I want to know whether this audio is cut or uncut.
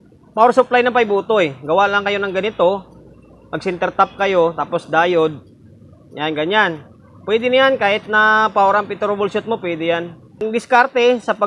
cut